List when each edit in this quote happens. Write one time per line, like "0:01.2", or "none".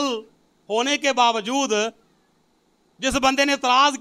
none